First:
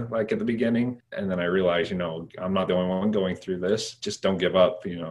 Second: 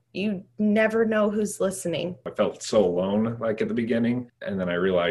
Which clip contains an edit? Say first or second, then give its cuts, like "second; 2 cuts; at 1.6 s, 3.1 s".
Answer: second; 1 cut; at 2.2 s